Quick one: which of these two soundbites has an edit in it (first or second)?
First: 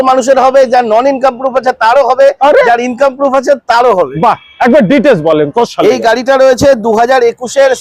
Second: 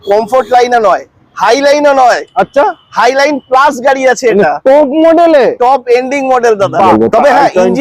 second